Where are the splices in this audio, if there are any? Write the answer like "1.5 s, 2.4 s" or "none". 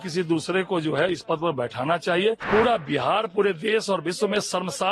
2.4 s